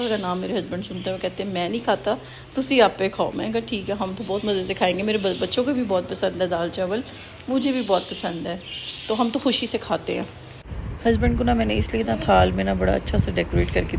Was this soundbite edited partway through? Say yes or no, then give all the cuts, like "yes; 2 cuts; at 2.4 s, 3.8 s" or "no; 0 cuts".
no; 0 cuts